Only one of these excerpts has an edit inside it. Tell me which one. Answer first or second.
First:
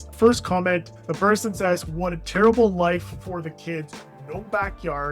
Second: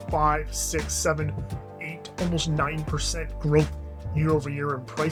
first